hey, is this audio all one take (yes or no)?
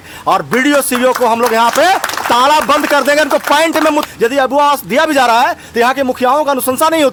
yes